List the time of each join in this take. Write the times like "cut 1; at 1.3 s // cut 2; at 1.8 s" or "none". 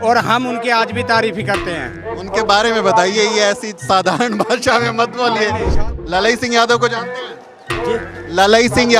cut 1; at 5.8 s